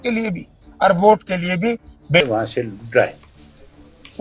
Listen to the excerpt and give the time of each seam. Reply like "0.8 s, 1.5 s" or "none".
2.2 s